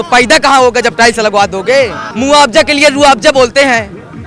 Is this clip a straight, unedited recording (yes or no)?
yes